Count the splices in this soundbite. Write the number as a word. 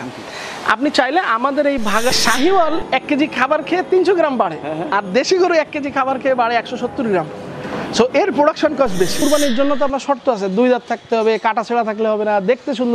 two